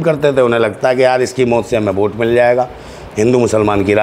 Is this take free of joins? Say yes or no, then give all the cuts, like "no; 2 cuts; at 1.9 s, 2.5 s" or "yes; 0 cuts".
yes; 0 cuts